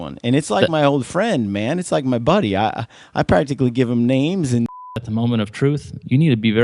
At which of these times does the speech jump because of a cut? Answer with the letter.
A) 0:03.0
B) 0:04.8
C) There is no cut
B